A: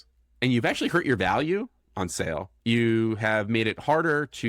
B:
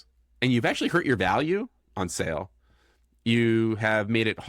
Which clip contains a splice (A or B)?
A